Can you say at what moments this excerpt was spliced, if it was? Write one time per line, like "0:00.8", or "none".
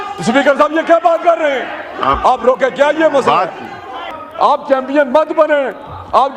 0:04.1